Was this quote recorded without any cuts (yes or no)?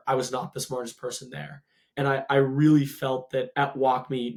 yes